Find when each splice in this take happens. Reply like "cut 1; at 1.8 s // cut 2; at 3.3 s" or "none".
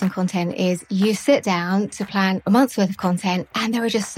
cut 1; at 2.4 s